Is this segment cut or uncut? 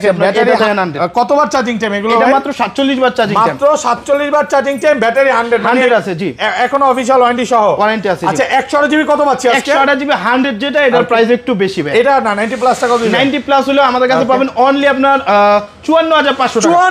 uncut